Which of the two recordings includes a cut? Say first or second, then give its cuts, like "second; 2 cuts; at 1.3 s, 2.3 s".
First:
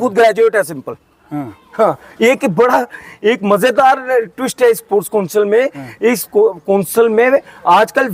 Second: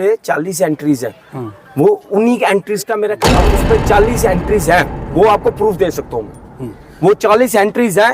second; 1 cut; at 3.2 s